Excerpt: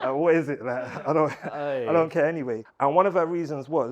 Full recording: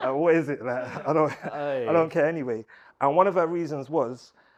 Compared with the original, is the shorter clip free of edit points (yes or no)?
no